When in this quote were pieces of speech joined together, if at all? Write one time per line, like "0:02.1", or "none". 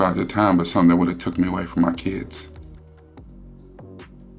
0:02.7